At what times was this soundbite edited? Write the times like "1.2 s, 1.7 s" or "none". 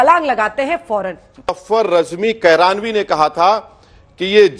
1.6 s